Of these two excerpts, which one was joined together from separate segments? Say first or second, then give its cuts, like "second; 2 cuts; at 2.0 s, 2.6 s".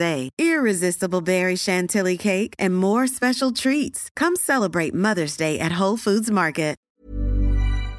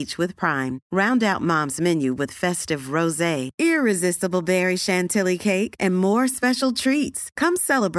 first; 1 cut; at 6.8 s